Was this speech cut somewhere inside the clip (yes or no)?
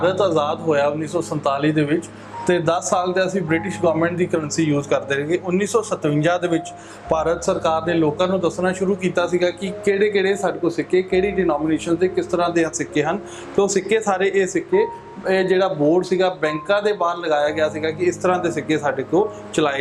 no